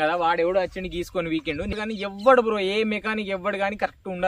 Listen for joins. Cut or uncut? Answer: cut